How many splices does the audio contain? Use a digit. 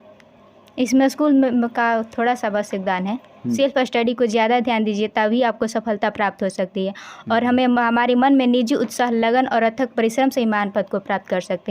1